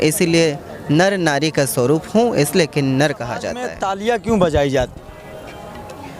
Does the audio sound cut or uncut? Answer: cut